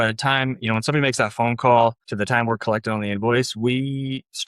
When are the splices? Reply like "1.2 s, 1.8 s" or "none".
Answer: 2.0 s